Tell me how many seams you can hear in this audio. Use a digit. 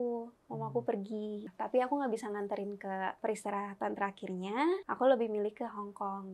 3